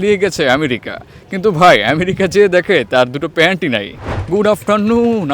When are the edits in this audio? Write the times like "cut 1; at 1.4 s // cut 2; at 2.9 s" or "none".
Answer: cut 1; at 4.0 s